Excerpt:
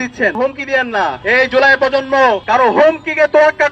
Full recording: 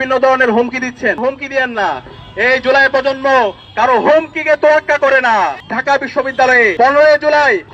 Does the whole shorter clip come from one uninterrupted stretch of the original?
no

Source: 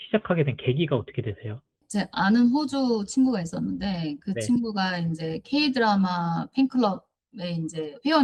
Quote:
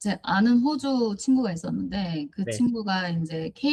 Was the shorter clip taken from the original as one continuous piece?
yes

